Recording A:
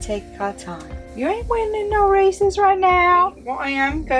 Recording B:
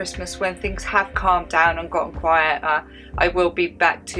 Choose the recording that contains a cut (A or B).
A